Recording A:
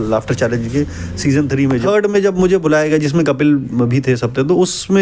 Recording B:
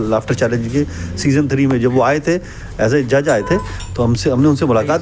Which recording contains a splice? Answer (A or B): A